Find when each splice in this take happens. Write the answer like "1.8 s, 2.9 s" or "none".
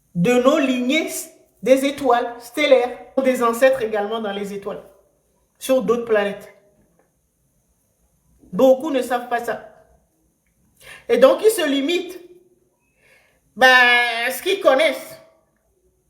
3.2 s